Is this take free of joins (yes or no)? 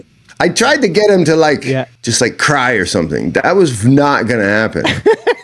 no